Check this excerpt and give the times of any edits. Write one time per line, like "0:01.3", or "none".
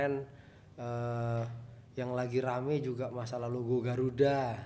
none